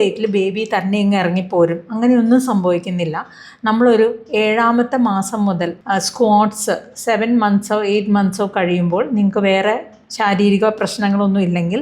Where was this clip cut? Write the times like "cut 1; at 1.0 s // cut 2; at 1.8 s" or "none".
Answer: cut 1; at 5.8 s